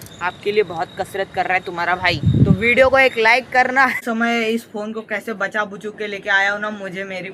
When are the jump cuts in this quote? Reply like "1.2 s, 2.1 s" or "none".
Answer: 4.0 s